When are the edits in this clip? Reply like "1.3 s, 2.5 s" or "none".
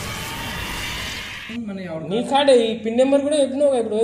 1.5 s